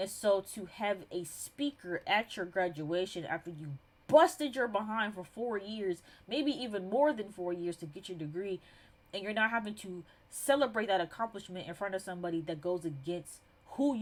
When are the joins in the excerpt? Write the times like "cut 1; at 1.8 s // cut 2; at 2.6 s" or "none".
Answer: none